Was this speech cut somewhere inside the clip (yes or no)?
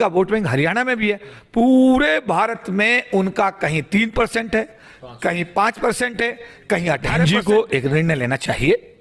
yes